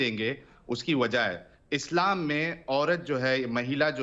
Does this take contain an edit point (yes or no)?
no